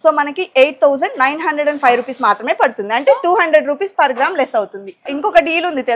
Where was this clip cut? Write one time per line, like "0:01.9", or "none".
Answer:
0:05.0

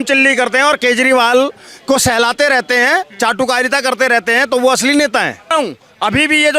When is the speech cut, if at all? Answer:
0:05.5

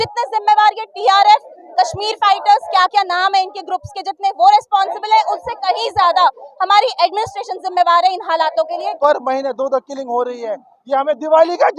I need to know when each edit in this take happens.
0:08.8

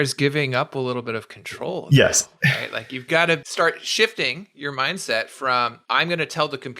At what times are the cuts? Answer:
0:03.4
0:05.8

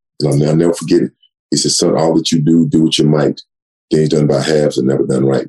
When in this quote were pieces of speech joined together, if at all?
none

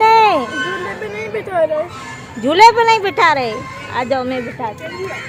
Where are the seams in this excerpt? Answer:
none

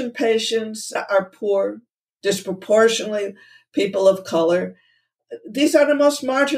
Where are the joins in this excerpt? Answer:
0:01.0

